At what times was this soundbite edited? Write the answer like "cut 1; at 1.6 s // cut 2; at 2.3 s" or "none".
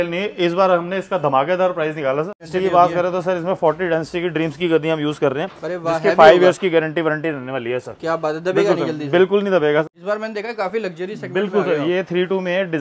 cut 1; at 2.4 s // cut 2; at 9.9 s